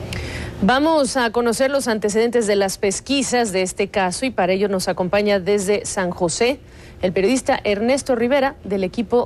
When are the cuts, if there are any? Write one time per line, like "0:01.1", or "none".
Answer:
0:02.4